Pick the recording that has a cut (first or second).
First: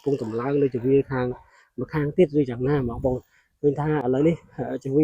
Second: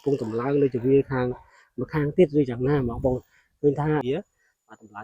second